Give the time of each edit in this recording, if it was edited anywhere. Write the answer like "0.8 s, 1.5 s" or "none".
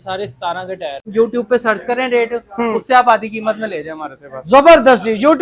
0.9 s